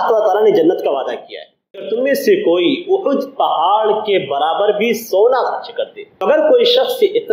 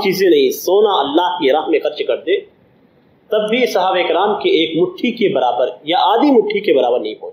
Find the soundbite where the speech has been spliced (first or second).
first